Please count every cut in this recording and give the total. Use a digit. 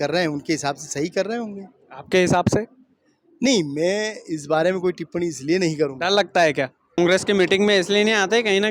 1